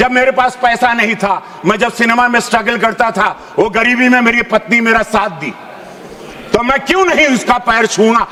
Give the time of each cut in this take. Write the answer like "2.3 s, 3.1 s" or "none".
none